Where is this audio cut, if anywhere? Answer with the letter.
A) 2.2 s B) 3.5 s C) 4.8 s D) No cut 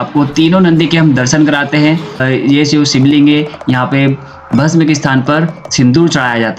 A